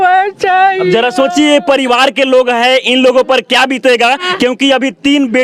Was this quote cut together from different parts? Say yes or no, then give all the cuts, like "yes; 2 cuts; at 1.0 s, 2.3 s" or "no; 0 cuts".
no; 0 cuts